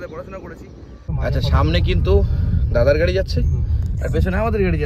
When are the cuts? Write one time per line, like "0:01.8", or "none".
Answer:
0:01.0